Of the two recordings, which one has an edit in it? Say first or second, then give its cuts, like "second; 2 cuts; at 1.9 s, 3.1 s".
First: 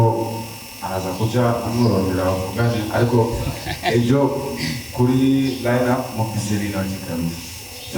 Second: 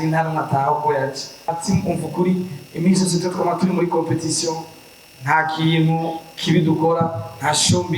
second; 1 cut; at 1.5 s